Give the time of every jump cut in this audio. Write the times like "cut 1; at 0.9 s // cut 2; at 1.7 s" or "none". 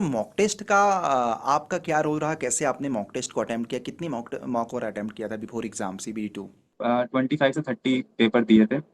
cut 1; at 6.8 s

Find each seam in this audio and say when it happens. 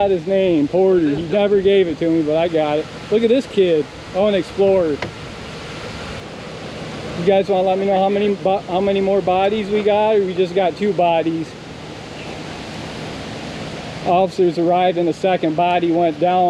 cut 1; at 6.2 s

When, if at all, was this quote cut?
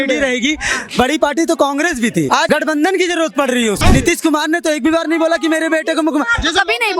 cut 1; at 2.4 s // cut 2; at 3.8 s

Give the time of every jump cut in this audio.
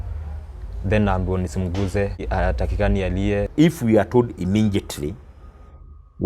cut 1; at 2.2 s // cut 2; at 3.5 s

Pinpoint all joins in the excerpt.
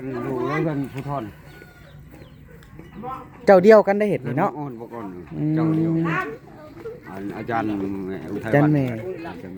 none

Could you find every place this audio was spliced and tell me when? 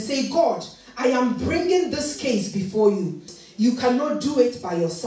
cut 1; at 3.3 s

